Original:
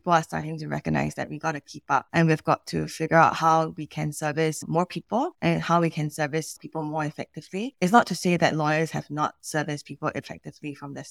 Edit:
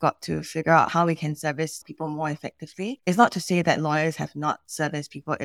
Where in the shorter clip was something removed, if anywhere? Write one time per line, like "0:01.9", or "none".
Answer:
0:00.9